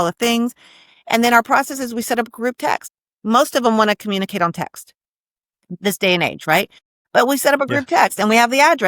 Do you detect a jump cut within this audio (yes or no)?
yes